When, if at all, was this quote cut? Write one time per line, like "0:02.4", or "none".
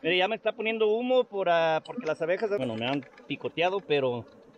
0:02.6